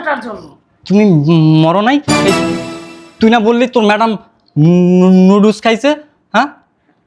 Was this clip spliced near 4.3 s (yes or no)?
no